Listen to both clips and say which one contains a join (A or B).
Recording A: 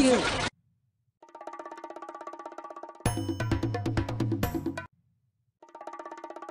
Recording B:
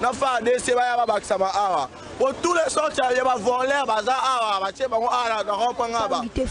A